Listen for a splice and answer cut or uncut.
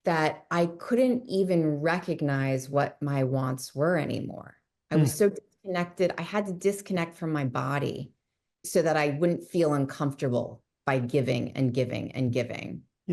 cut